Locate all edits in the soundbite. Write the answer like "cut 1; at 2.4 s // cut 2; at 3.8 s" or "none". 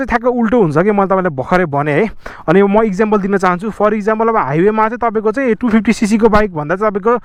none